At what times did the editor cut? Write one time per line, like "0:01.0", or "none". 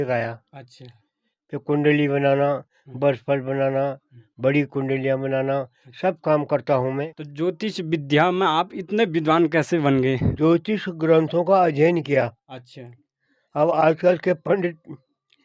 0:07.2
0:10.3